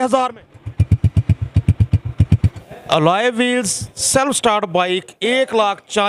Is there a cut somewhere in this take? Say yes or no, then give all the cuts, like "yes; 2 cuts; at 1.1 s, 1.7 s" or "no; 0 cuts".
yes; 1 cut; at 2.6 s